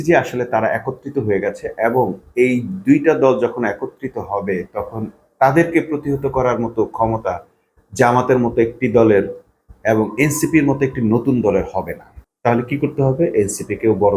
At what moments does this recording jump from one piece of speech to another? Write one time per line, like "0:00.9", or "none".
none